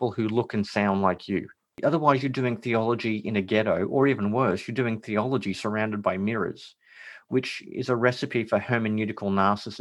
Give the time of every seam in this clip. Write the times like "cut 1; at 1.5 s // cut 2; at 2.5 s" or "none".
cut 1; at 1.7 s